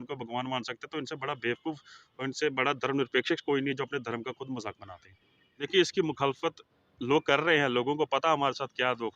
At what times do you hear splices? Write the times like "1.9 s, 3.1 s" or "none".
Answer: 5.7 s